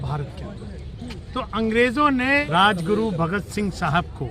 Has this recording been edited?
yes; 1 cut; at 2.4 s

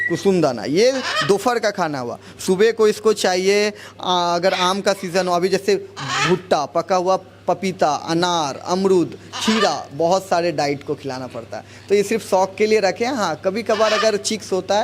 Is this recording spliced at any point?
no; 0 cuts

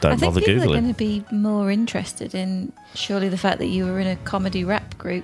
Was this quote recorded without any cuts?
yes; 0 cuts

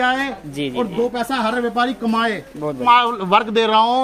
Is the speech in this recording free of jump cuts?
no; 1 cut; at 2.8 s

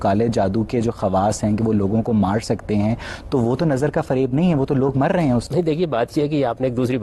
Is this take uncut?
yes; 0 cuts

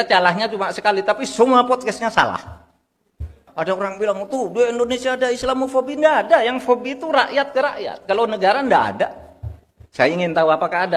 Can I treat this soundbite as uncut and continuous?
no; 1 cut; at 3.4 s

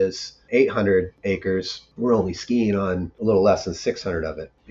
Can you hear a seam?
no; 0 cuts

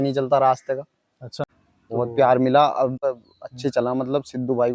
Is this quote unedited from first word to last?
no; 1 cut; at 1.5 s

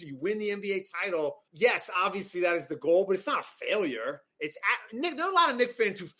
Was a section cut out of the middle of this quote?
yes; 1 cut; at 1.4 s

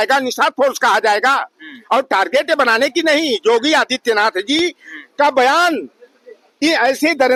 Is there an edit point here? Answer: no; 0 cuts

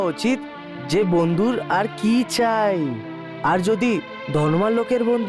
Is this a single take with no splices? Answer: yes; 0 cuts

